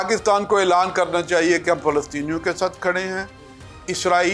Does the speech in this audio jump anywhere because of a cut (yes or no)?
no